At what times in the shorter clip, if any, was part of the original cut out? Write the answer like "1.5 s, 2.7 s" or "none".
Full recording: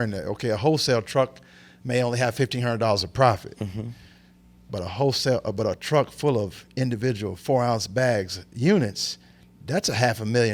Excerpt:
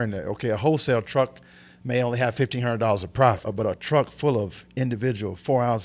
3.5 s